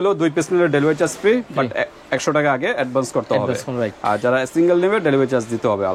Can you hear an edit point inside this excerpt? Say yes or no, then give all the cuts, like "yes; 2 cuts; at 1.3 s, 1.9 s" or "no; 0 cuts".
no; 0 cuts